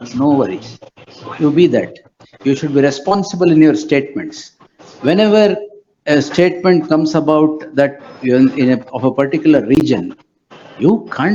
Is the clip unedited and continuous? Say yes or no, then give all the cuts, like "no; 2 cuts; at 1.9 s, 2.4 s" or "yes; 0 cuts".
yes; 0 cuts